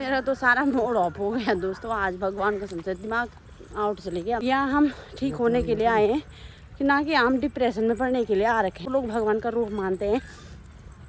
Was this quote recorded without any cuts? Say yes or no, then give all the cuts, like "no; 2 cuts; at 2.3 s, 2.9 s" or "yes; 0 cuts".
no; 2 cuts; at 4.4 s, 8.8 s